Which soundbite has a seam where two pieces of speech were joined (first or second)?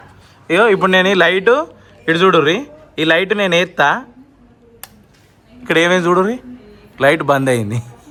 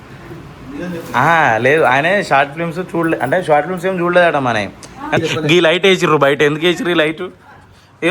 second